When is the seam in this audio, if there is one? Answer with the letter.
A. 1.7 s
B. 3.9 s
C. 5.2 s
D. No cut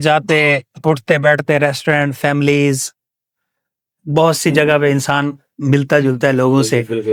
D